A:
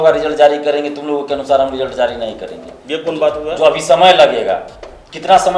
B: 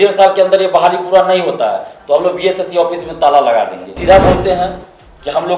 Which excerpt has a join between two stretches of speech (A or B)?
B